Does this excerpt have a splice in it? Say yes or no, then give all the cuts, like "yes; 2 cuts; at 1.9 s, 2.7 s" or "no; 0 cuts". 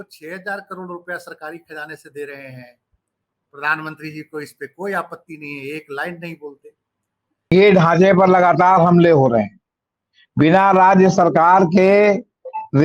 yes; 1 cut; at 7.5 s